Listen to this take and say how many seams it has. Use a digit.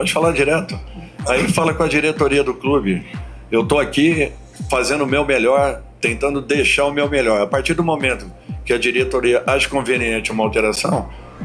0